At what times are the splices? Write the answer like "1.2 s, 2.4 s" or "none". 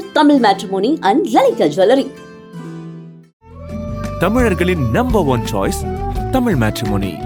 none